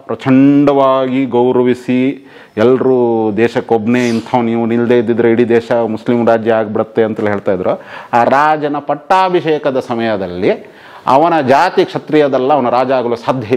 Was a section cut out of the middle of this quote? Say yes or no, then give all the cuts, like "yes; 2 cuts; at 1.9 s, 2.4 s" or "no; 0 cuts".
no; 0 cuts